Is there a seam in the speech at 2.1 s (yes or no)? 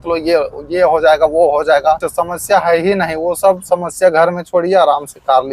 yes